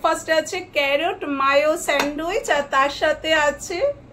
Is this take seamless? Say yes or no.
yes